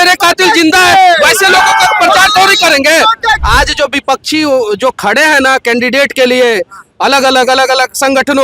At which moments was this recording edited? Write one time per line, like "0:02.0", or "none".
0:03.3